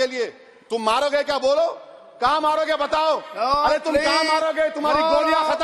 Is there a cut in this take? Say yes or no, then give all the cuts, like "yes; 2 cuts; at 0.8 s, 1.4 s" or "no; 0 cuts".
no; 0 cuts